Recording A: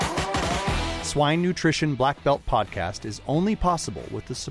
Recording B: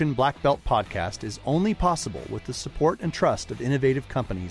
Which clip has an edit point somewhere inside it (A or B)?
A